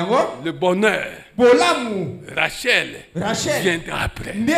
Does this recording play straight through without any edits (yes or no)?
yes